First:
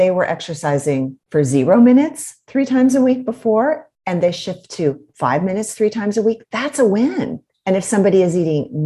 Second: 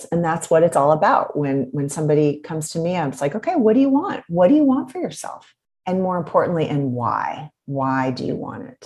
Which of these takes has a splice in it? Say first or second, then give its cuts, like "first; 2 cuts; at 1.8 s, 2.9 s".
first; 3 cuts; at 1.2 s, 3.9 s, 7.4 s